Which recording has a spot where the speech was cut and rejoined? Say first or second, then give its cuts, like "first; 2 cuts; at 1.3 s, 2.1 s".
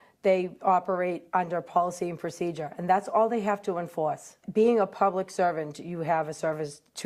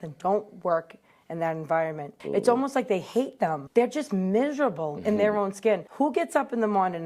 second; 1 cut; at 3.6 s